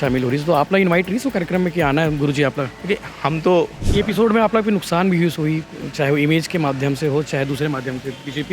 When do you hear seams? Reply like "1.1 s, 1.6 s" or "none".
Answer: 3.8 s